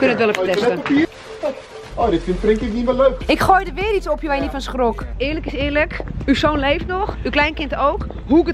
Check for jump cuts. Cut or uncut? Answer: cut